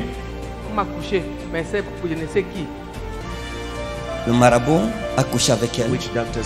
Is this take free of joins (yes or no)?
no